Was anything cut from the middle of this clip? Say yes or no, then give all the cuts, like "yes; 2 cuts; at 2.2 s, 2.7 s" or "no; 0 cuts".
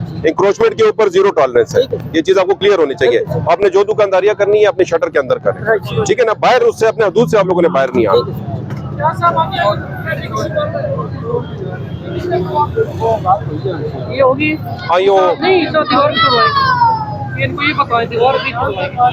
no; 0 cuts